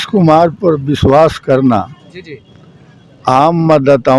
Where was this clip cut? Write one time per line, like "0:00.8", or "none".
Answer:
none